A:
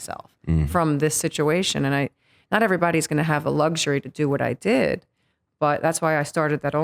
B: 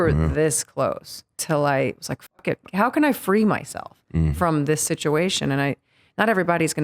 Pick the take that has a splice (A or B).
B